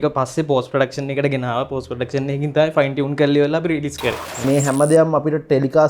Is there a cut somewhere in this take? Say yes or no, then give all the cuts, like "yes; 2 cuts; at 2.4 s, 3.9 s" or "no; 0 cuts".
yes; 1 cut; at 4.4 s